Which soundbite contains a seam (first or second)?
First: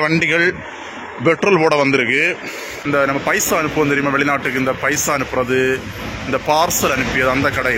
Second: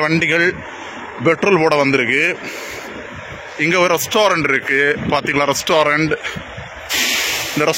first